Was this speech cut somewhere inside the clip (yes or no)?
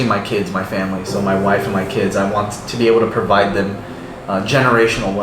no